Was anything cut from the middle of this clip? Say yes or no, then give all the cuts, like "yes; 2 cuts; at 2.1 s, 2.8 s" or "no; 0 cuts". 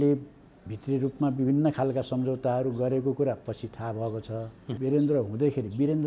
yes; 1 cut; at 4.6 s